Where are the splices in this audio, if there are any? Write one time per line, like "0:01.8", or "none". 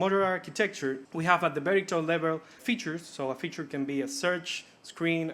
0:01.1
0:02.6